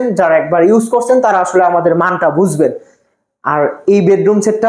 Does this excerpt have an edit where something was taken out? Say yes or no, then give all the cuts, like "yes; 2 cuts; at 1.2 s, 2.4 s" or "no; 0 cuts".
no; 0 cuts